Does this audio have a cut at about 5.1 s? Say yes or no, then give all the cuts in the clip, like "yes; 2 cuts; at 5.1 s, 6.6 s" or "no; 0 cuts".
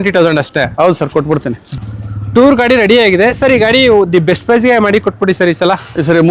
no; 1 cut; at 1.6 s